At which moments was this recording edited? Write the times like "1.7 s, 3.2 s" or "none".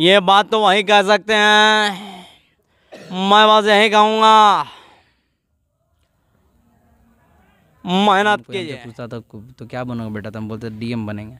8.6 s